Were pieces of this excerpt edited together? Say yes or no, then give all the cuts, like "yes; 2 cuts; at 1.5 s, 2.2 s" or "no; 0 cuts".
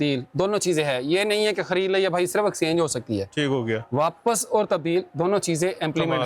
no; 0 cuts